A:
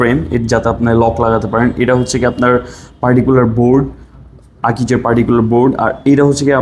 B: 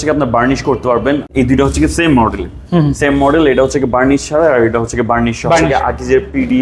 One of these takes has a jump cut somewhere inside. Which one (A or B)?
B